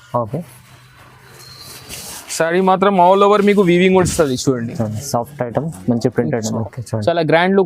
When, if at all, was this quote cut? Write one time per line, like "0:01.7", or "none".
0:06.6